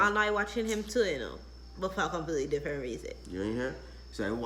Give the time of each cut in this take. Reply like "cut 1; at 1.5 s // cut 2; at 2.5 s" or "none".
none